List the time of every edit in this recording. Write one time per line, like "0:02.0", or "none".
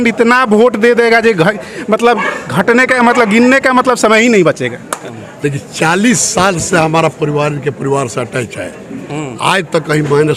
0:05.1